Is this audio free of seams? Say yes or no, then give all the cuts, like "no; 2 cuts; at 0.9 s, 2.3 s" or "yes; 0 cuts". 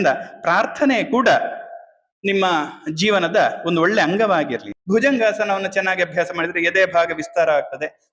no; 1 cut; at 4.7 s